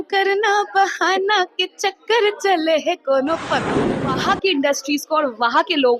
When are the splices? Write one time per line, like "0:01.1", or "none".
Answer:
0:03.9